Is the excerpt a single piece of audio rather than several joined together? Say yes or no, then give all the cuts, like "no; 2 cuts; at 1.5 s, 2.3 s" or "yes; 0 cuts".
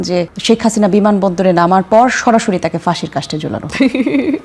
yes; 0 cuts